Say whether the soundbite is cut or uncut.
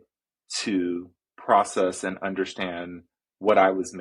uncut